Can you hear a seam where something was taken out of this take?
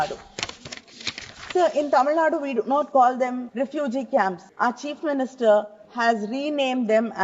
yes; 3 cuts; at 3.4 s, 4.5 s, 5.8 s

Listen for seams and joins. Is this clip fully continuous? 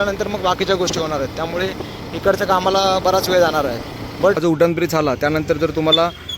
no; 1 cut; at 4.4 s

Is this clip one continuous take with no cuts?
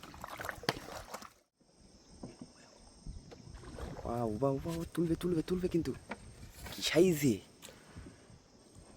no; 1 cut; at 1.6 s

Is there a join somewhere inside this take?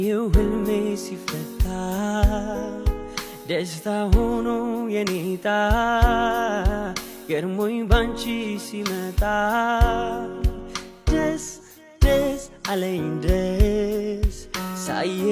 no; 0 cuts

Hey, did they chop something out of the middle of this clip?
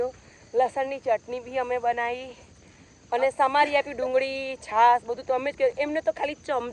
no; 0 cuts

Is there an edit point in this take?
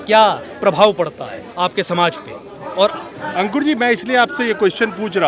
no; 0 cuts

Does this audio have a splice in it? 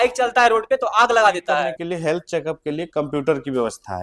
yes; 1 cut; at 1.8 s

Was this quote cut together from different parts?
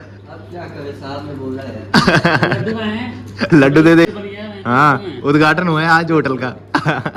no; 0 cuts

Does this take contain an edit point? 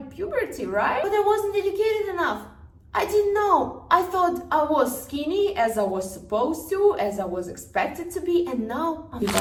no; 0 cuts

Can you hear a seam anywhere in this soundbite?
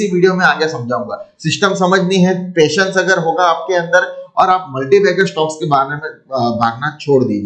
no; 0 cuts

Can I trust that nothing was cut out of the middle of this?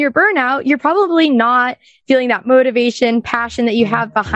yes; 0 cuts

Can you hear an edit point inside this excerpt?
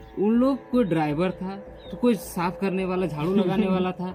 no; 0 cuts

